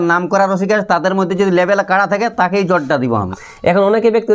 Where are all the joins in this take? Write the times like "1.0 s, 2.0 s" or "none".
3.2 s

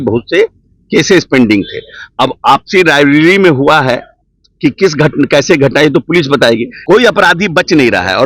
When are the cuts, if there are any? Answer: 6.7 s

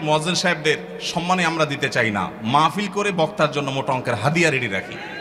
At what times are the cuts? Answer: none

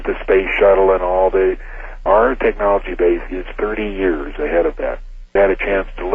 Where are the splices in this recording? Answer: 2.0 s, 5.3 s

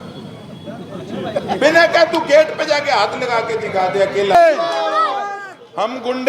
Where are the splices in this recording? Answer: 4.3 s

